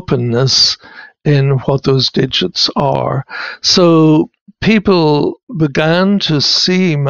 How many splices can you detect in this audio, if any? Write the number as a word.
zero